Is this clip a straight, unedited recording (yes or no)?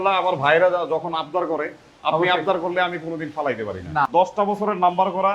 no